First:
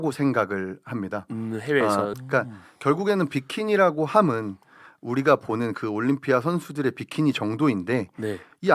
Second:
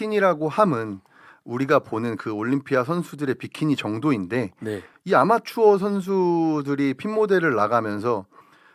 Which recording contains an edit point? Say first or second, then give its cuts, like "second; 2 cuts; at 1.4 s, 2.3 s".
first; 1 cut; at 2.1 s